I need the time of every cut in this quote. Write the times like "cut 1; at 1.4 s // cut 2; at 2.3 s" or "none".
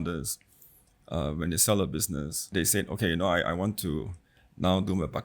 cut 1; at 2.5 s